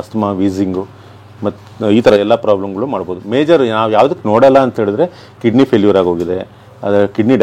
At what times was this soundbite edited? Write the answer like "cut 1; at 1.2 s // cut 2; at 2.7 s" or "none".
none